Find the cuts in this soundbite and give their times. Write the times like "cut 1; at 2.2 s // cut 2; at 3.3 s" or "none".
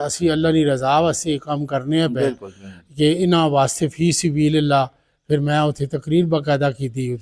none